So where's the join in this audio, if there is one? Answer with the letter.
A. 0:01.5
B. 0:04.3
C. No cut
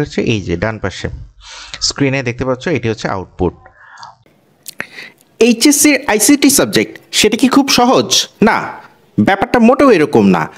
B